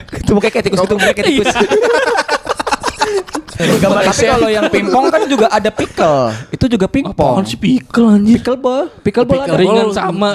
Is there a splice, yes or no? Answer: yes